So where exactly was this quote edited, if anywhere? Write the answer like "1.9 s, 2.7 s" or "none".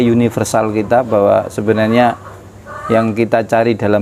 none